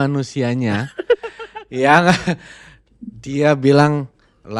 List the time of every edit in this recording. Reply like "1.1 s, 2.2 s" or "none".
none